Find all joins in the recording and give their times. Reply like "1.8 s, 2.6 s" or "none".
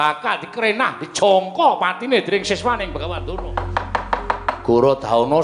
3.1 s